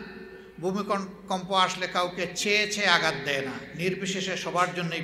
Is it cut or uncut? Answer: uncut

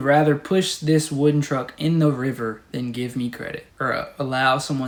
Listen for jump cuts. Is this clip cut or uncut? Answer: uncut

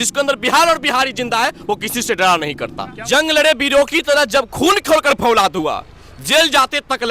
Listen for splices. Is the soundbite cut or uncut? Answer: cut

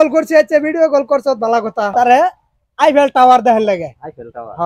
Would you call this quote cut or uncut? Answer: cut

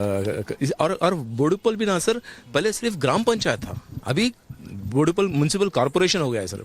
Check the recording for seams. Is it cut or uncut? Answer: cut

